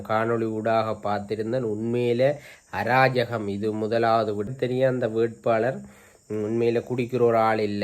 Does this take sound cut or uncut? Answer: cut